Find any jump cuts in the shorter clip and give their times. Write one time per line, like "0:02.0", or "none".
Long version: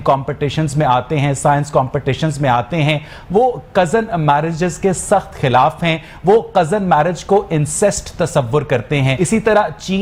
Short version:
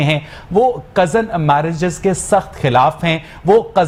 none